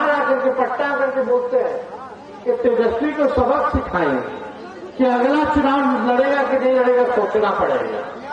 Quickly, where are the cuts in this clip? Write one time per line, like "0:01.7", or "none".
none

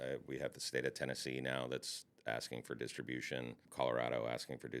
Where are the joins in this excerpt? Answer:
0:03.7

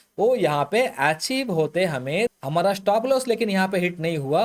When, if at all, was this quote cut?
0:02.3

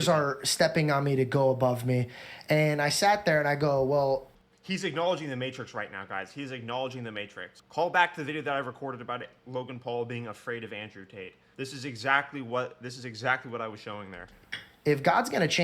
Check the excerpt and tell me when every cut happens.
0:11.4

